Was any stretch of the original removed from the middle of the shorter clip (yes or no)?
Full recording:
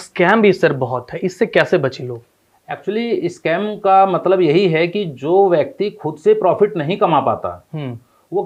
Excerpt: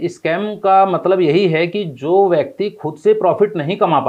no